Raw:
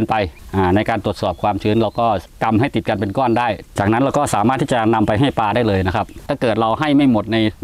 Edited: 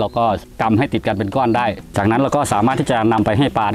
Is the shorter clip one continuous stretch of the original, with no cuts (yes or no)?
yes